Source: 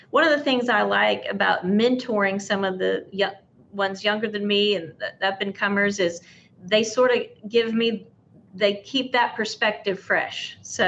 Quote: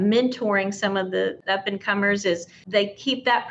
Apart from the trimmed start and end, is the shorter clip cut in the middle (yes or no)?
yes